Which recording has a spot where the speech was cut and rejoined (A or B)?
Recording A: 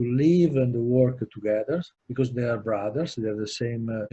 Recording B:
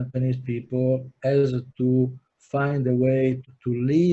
A